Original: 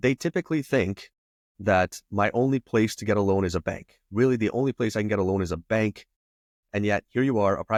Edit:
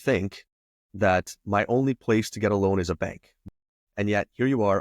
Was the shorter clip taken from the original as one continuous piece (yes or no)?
no